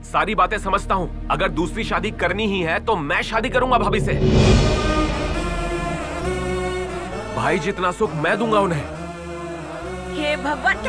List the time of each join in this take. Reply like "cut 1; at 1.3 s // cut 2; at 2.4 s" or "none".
cut 1; at 1.1 s